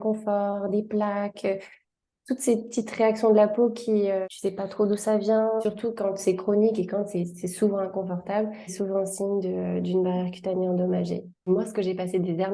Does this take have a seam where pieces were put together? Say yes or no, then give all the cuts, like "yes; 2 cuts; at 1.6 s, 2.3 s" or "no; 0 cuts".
yes; 4 cuts; at 4.3 s, 5.6 s, 8.7 s, 11.5 s